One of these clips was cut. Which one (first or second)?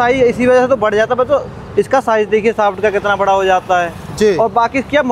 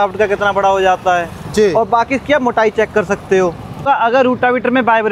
second